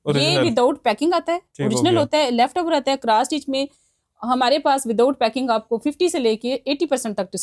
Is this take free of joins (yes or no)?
yes